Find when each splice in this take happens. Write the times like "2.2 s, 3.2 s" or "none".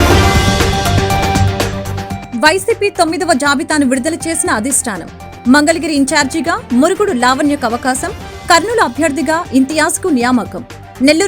2.1 s